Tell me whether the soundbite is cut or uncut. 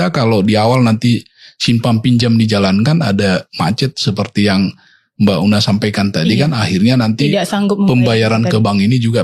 uncut